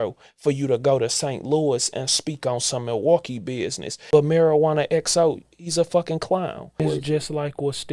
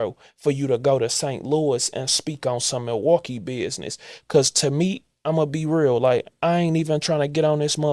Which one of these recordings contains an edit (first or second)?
first